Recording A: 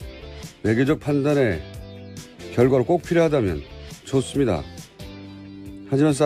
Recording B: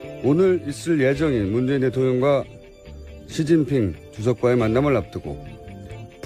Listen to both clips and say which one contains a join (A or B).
A